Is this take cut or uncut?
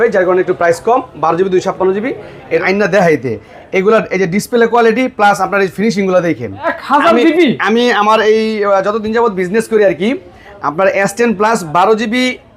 cut